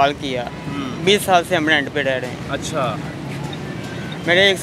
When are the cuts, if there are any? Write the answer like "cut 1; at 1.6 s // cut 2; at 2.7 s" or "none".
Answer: none